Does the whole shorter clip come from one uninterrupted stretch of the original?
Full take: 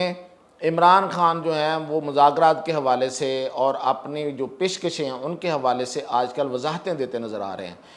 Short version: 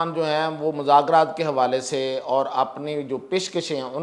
yes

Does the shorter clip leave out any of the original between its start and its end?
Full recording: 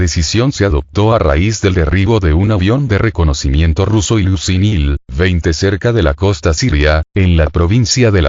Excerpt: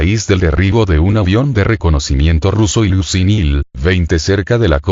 no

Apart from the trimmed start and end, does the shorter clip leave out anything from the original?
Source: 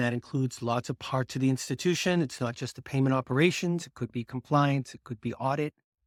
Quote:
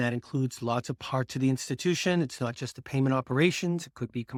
no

